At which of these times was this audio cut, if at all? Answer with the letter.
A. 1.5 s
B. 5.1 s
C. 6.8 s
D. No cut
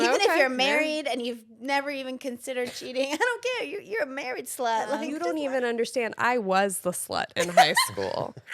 B